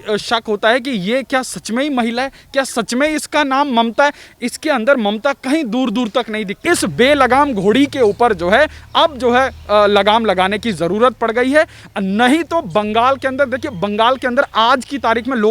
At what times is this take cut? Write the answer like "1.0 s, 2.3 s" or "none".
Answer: 6.6 s